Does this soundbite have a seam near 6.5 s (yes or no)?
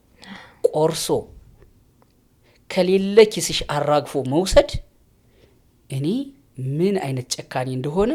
no